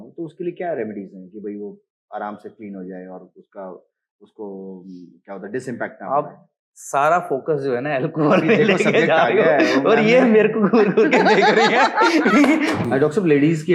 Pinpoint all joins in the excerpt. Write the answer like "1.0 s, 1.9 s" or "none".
12.8 s